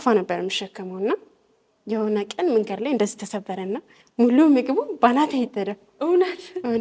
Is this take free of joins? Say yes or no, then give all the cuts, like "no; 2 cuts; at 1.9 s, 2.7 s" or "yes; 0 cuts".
yes; 0 cuts